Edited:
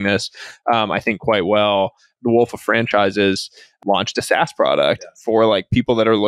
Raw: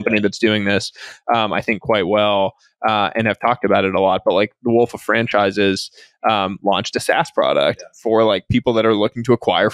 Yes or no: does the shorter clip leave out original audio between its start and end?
yes